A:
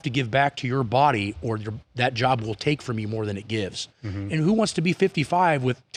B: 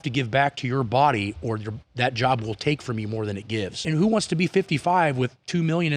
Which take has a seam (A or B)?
B